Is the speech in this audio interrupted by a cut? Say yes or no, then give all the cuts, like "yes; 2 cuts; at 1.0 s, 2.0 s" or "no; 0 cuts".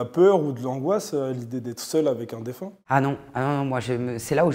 no; 0 cuts